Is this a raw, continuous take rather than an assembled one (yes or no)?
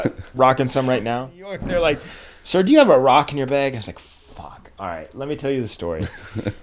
no